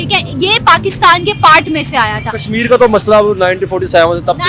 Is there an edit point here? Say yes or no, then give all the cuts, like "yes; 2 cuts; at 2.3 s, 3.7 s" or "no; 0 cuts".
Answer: no; 0 cuts